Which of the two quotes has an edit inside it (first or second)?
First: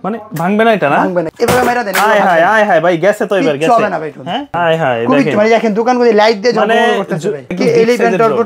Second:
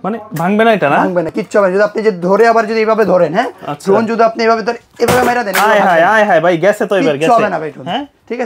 first